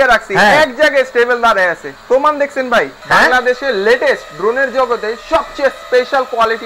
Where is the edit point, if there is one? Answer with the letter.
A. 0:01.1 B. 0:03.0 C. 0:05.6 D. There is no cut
B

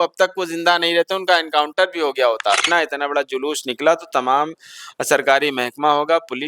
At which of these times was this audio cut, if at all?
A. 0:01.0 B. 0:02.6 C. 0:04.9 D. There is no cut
B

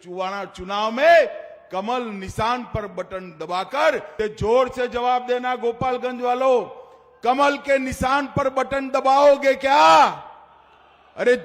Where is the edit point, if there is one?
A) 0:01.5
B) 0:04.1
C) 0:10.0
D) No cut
B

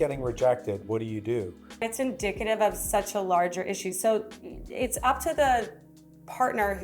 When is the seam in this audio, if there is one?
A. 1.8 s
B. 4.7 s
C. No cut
A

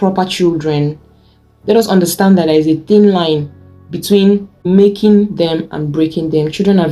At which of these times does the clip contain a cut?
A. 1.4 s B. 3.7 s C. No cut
C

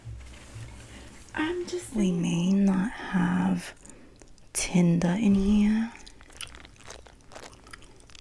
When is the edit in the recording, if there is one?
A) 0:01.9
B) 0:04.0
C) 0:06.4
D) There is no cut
A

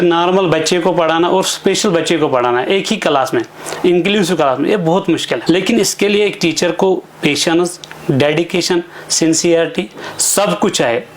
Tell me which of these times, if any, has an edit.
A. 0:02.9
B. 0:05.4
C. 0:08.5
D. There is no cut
B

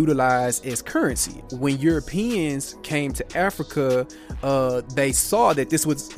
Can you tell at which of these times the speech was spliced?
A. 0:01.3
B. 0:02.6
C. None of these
A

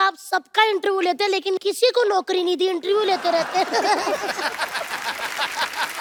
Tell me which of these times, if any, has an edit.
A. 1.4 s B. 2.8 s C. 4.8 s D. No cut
D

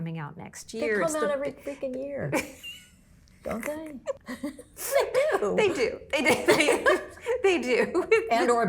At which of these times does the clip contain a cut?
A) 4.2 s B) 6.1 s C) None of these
A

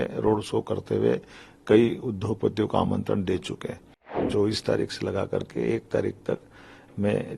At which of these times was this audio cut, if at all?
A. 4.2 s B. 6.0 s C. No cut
A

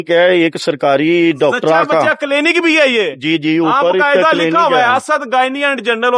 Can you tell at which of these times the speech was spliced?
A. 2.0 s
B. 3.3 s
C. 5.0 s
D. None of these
D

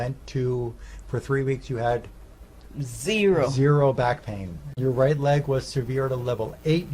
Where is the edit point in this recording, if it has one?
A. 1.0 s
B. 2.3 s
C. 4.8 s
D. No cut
C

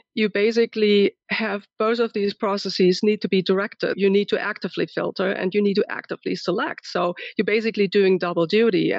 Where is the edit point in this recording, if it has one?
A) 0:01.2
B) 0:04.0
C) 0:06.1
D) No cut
B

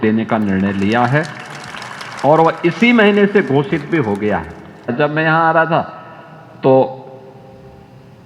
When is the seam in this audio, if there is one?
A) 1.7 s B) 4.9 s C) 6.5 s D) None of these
B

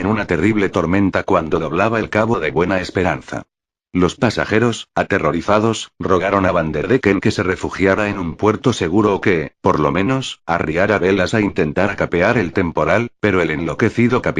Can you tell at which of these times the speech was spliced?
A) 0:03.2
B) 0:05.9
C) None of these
B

